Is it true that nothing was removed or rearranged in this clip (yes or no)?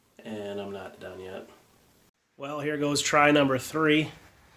no